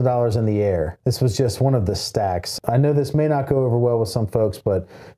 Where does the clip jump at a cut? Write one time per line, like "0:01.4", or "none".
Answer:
0:00.9
0:02.5